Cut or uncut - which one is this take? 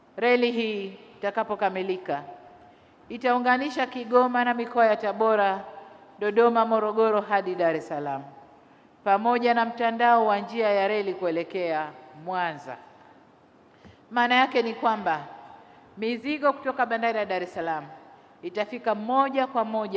uncut